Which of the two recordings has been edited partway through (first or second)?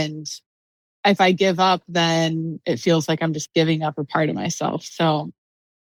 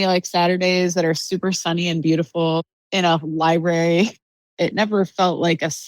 second